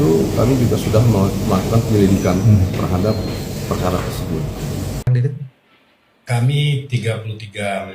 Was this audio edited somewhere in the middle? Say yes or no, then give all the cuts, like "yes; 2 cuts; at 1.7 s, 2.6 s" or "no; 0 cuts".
yes; 1 cut; at 5.0 s